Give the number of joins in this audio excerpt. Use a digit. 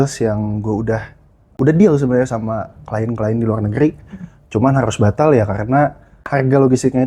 2